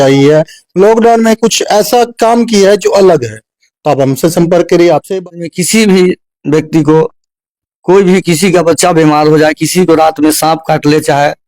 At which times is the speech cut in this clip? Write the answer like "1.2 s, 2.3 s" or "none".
5.4 s